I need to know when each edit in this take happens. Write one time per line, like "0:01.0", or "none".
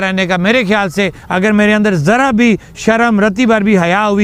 none